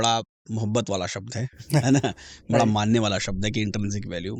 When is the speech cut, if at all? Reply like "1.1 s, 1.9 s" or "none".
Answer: none